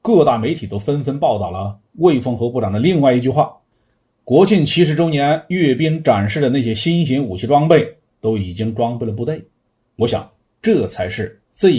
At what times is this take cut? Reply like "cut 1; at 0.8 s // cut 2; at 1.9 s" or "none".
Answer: none